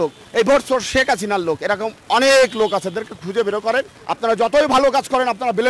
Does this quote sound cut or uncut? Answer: cut